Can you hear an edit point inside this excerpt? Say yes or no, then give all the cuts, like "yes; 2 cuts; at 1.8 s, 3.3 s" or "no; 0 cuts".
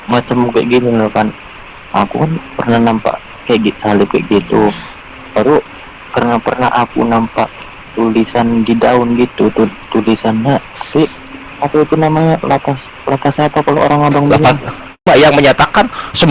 yes; 1 cut; at 15.0 s